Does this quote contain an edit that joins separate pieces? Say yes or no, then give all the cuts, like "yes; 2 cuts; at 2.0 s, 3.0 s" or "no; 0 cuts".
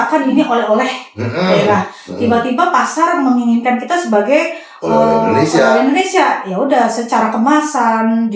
no; 0 cuts